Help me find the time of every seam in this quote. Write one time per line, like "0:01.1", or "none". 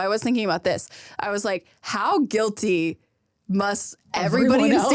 none